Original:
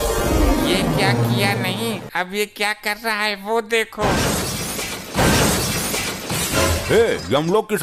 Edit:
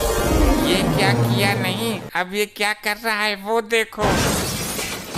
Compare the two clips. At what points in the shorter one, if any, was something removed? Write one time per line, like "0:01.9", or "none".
none